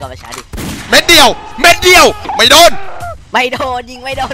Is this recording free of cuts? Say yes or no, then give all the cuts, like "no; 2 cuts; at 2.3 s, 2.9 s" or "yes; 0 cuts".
no; 1 cut; at 2.3 s